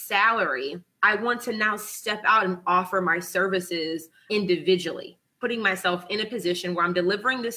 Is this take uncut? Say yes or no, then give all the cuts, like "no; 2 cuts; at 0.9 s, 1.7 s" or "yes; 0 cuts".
no; 3 cuts; at 0.9 s, 4.2 s, 5.3 s